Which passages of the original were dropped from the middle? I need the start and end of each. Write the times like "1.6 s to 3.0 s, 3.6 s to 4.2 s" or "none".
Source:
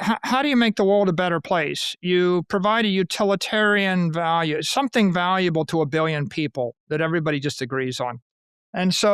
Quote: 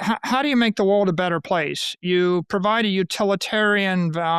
none